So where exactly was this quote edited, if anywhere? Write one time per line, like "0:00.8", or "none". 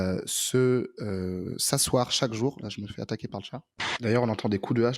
0:03.9